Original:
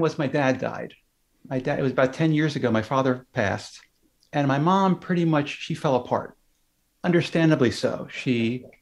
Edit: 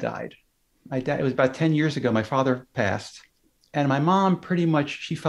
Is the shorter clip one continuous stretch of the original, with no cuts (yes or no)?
yes